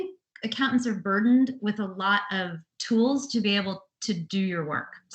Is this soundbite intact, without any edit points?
yes; 0 cuts

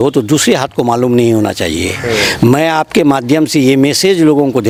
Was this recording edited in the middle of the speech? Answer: no; 0 cuts

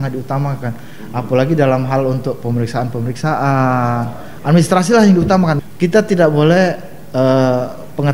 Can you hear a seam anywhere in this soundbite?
yes; 1 cut; at 5.5 s

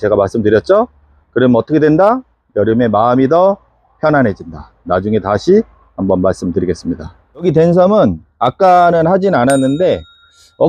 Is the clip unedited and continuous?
yes; 0 cuts

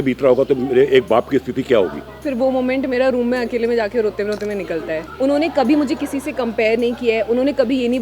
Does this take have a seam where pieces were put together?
yes; 2 cuts; at 2.2 s, 5.1 s

